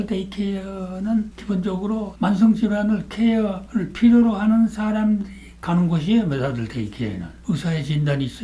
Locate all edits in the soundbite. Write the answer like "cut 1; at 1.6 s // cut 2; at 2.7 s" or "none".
cut 1; at 7.3 s